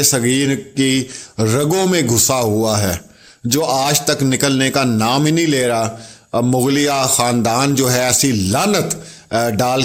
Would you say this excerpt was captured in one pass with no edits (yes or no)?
yes